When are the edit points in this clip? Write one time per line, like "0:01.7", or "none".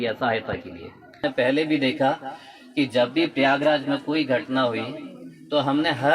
0:01.2